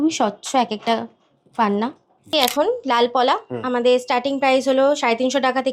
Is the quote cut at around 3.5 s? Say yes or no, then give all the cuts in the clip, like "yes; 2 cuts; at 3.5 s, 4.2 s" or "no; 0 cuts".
no; 1 cut; at 2.2 s